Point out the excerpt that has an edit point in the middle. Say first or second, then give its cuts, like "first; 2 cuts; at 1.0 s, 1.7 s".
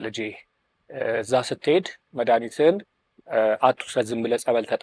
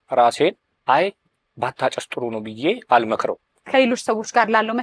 second; 1 cut; at 3.6 s